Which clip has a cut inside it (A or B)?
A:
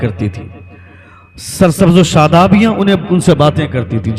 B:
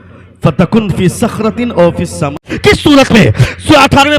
B